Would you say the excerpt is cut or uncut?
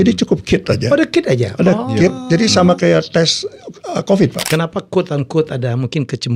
cut